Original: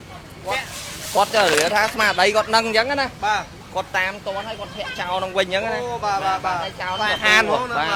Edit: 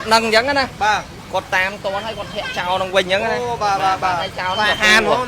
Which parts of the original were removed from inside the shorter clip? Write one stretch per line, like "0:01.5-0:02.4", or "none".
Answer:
none